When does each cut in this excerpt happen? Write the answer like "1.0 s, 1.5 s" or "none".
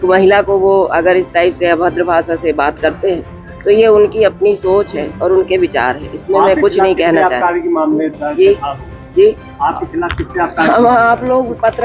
none